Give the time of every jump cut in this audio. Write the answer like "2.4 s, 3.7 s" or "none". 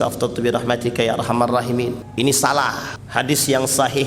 2.0 s, 2.9 s